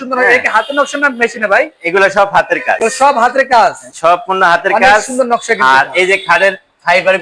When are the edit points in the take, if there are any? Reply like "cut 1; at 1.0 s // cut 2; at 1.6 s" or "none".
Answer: none